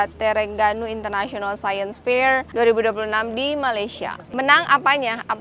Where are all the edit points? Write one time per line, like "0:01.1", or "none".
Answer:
0:02.5
0:04.2